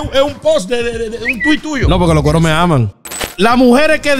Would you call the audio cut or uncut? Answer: cut